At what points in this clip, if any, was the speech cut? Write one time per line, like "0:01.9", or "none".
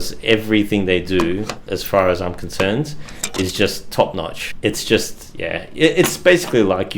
0:04.4